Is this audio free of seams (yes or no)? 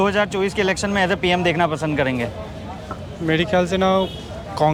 yes